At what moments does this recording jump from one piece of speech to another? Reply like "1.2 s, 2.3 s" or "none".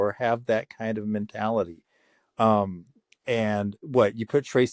3.8 s